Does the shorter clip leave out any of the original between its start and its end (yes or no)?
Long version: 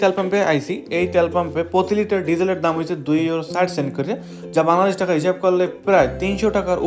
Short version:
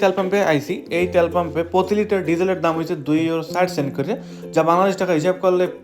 no